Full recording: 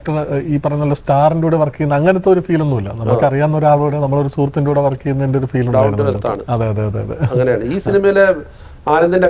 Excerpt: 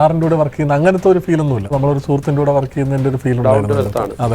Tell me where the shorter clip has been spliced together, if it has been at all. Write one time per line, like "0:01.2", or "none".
0:01.7